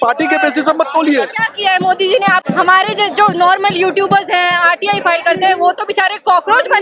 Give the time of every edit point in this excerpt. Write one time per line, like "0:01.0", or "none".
0:01.4
0:02.5